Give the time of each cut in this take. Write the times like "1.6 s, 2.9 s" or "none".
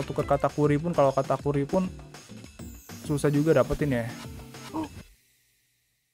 none